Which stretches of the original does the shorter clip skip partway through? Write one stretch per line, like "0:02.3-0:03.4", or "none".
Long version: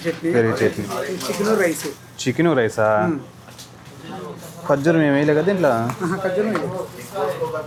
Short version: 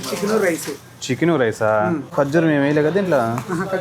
0:03.2-0:04.6